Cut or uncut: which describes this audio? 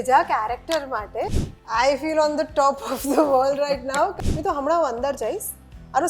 cut